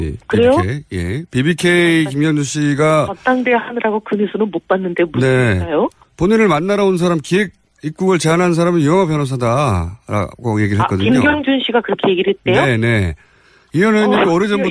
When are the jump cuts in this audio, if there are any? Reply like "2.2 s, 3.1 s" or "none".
10.0 s

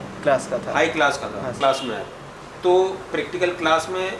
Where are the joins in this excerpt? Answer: 1.6 s

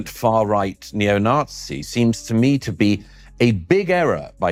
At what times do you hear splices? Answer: none

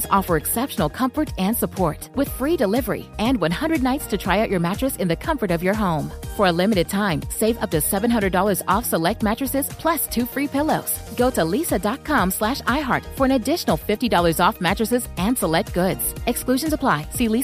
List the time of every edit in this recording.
none

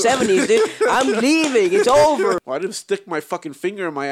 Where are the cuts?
2.4 s

